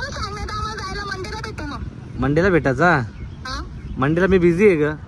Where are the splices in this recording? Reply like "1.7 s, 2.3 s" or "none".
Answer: none